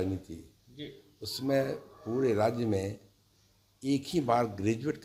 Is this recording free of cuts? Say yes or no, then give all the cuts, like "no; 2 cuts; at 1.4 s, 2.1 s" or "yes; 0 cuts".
yes; 0 cuts